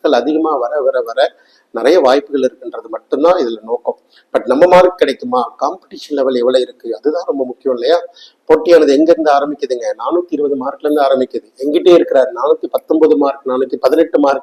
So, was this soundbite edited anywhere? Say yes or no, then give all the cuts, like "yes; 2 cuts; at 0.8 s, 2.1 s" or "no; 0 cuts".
no; 0 cuts